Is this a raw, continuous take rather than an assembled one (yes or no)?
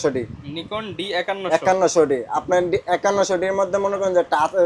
yes